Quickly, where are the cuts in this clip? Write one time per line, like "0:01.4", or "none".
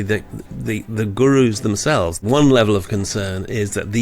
0:02.1

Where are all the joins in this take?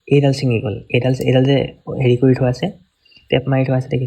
none

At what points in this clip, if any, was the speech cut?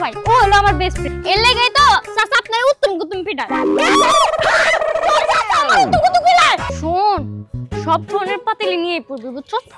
0:06.7

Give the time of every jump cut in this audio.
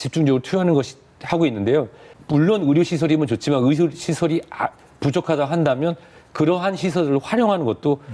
0:02.1

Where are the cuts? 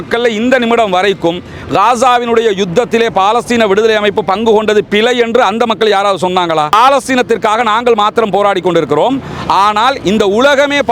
0:06.7

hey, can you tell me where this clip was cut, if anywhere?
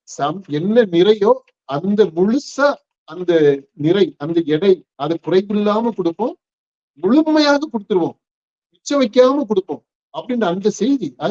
none

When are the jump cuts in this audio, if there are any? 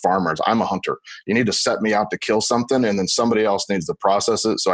none

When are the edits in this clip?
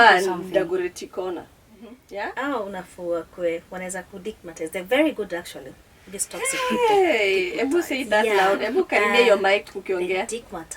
0:02.0

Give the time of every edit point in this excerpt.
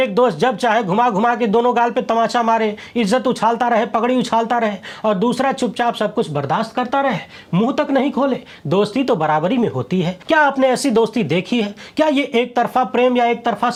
none

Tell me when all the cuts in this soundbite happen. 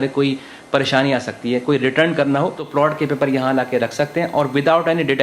0:02.6

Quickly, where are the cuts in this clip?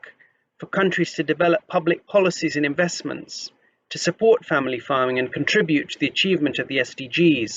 none

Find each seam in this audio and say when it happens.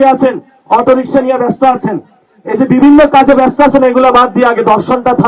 none

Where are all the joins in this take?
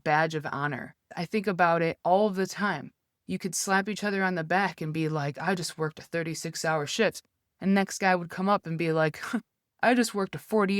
0:01.1

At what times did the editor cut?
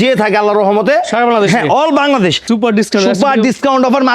0:02.4

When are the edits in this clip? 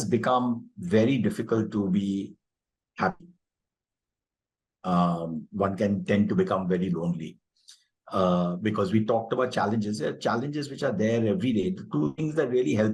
none

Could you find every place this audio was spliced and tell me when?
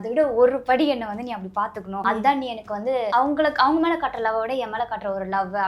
0:01.9
0:03.1

